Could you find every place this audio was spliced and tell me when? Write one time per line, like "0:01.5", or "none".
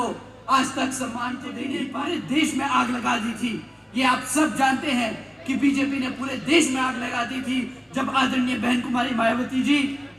0:01.7